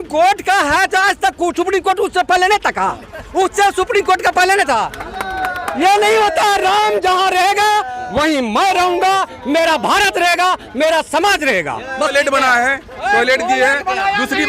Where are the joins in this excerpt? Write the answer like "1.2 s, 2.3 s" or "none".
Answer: 12.1 s